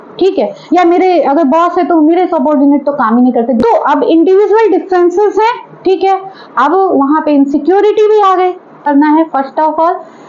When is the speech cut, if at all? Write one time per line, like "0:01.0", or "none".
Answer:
0:03.6
0:08.8

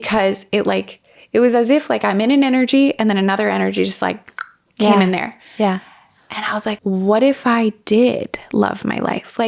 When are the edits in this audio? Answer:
0:06.8

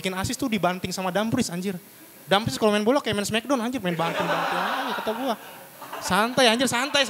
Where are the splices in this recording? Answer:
none

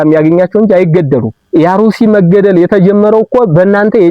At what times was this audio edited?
0:01.4

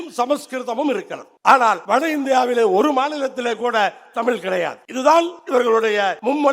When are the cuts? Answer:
0:01.2
0:01.8
0:04.8
0:05.7

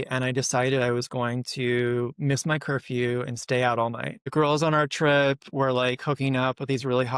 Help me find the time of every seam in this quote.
0:04.2

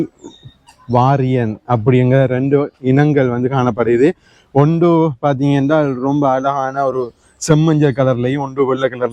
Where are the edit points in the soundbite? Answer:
none

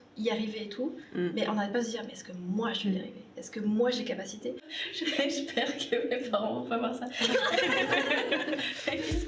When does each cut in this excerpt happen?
0:04.8

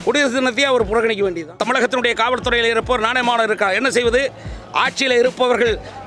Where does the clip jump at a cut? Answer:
0:01.6

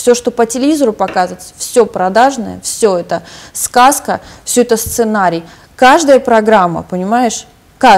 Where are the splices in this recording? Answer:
none

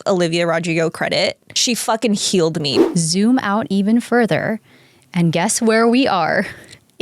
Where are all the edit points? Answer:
0:01.5
0:02.8

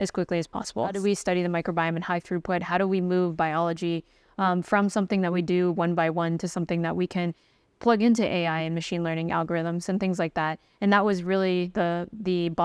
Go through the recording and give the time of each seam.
0:01.0

